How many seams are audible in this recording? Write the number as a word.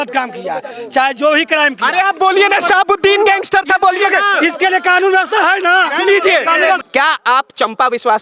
one